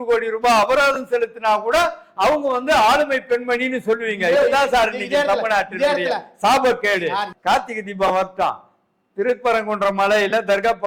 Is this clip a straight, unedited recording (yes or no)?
no